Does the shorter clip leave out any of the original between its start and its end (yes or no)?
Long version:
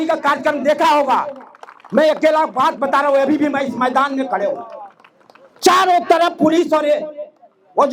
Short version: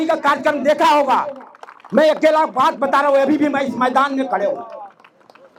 no